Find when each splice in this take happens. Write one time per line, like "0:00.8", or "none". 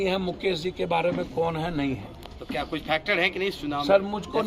none